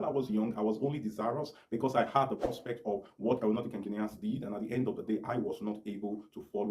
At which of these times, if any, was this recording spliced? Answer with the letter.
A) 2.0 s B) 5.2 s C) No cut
C